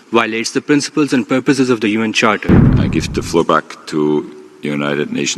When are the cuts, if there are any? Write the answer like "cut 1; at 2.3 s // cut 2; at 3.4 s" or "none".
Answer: cut 1; at 2.7 s

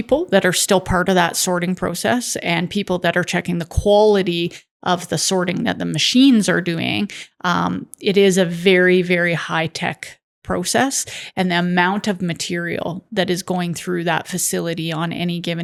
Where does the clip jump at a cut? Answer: none

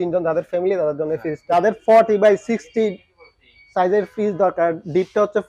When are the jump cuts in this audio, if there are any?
cut 1; at 1.5 s

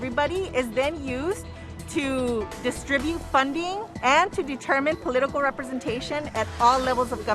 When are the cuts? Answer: cut 1; at 3.9 s

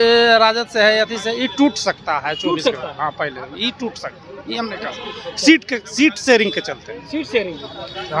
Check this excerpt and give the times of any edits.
none

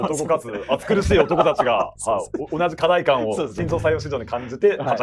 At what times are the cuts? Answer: none

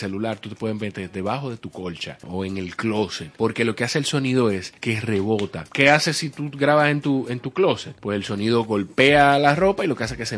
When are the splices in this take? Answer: cut 1; at 2.2 s // cut 2; at 3.2 s // cut 3; at 4.7 s // cut 4; at 5.6 s // cut 5; at 7.9 s

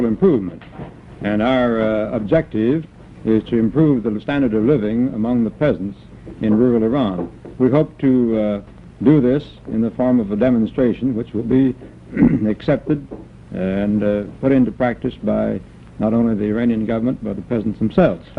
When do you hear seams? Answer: cut 1; at 5.3 s

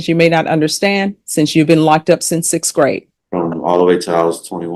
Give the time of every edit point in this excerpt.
cut 1; at 3.1 s

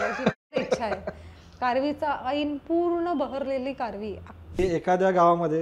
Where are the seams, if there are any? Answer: cut 1; at 4.6 s

